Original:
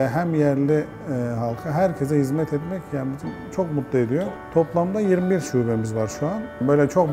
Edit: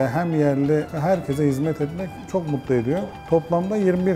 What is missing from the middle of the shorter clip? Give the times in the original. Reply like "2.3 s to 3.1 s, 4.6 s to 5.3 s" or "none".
0.9 s to 1.6 s, 2.9 s to 3.4 s

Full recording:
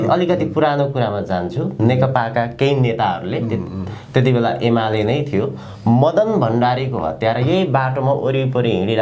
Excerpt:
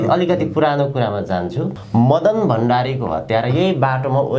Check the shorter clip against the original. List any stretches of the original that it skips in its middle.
1.7 s to 5.6 s

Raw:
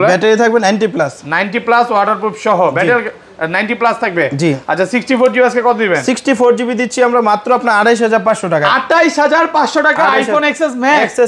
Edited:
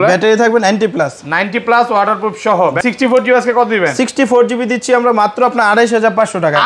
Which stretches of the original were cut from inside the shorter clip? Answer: 2.8 s to 4.9 s

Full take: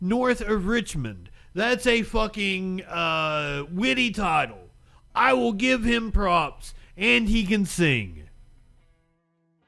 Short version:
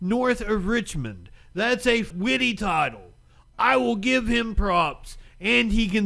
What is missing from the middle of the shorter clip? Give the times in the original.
2.1 s to 3.7 s

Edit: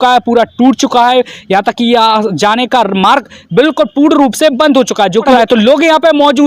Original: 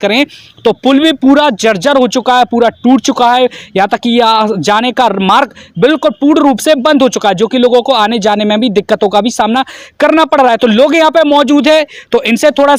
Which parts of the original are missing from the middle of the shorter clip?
7.5 s to 10.4 s

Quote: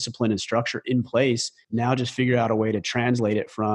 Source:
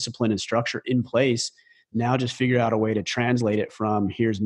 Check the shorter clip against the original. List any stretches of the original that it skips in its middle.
1.5 s to 1.8 s

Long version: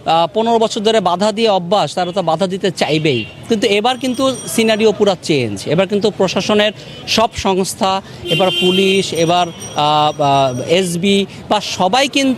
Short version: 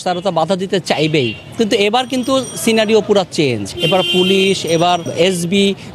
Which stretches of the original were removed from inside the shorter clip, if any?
5.6 s to 8.1 s, 9.6 s to 10.6 s

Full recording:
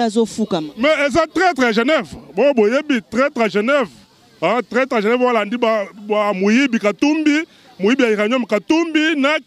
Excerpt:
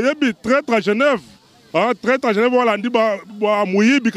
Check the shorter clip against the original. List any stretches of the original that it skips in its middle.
none

